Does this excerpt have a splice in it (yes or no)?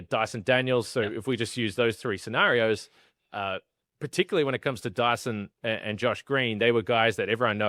no